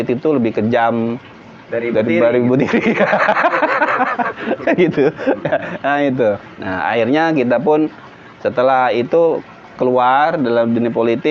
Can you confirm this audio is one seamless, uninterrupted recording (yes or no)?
no